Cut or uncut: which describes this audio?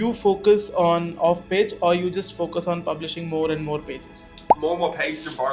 uncut